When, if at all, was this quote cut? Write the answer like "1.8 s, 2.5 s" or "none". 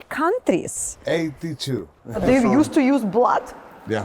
2.2 s